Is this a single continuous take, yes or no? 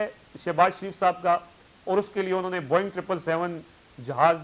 yes